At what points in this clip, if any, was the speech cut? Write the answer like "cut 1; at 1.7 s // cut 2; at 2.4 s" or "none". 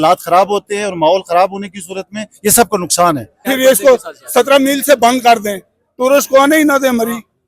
cut 1; at 3.4 s